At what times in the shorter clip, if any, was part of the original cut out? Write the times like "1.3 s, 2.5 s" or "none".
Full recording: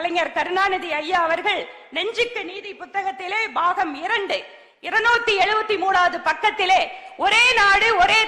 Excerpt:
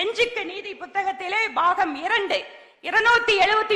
none